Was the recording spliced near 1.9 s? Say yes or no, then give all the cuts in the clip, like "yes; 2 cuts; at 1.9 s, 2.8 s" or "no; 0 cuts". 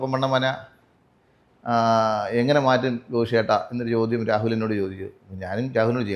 no; 0 cuts